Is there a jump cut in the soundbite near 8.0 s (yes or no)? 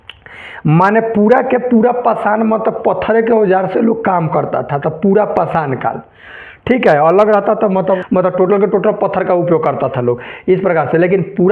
yes